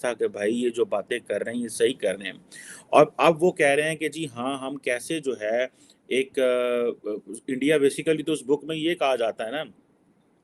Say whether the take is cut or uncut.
uncut